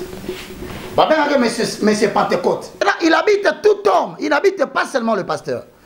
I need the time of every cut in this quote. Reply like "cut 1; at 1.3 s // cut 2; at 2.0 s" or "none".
cut 1; at 2.8 s